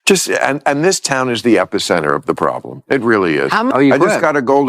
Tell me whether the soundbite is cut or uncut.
cut